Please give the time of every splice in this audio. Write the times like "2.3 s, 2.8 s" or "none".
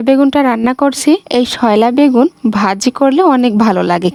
none